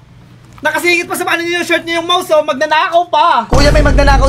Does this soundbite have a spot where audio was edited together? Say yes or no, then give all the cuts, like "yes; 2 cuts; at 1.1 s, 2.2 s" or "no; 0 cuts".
no; 0 cuts